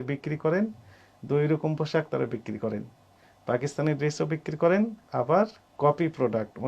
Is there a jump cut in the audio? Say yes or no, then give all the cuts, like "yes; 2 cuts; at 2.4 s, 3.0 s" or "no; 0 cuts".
no; 0 cuts